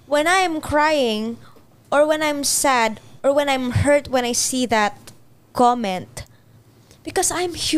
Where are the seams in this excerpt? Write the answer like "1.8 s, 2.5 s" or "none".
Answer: none